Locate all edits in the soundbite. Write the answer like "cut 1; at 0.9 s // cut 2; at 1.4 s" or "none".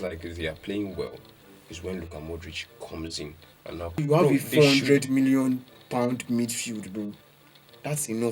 cut 1; at 4.0 s